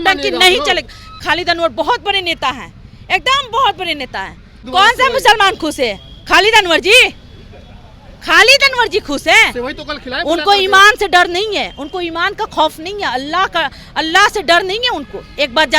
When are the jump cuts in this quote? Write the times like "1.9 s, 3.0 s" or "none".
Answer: 1.2 s, 4.6 s